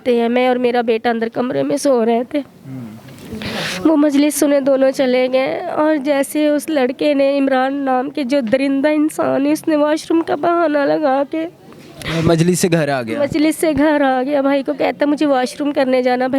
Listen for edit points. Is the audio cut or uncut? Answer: uncut